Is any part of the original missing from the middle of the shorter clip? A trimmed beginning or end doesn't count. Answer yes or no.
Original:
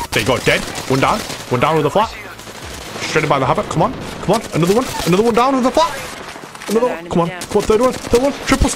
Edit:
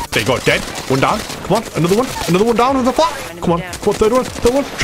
yes